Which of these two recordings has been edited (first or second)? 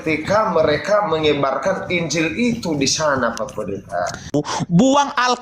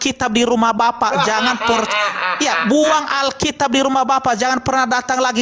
first